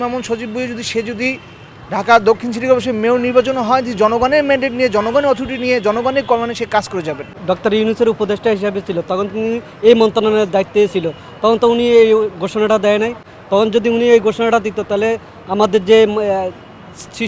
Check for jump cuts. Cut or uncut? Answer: uncut